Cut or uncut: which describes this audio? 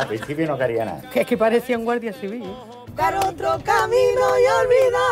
cut